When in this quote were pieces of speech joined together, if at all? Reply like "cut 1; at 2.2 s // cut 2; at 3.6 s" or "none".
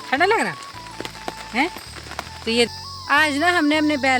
cut 1; at 2.7 s